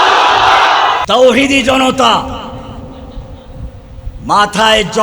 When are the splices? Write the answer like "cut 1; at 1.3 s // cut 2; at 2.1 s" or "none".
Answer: cut 1; at 1.0 s